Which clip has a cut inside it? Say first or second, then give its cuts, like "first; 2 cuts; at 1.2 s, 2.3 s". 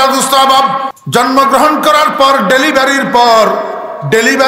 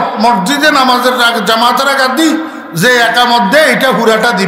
first; 1 cut; at 0.9 s